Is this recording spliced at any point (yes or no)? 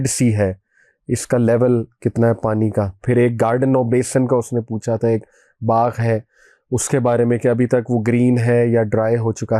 yes